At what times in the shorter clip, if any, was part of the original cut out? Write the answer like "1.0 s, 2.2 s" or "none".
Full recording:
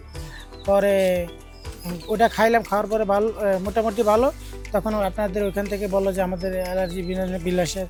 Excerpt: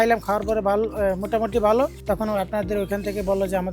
2.0 s